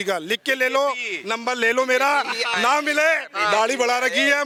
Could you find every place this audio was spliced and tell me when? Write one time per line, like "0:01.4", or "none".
none